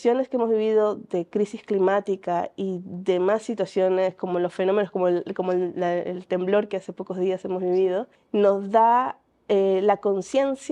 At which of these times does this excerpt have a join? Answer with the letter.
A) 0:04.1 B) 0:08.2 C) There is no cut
B